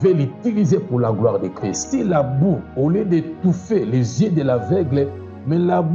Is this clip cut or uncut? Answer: cut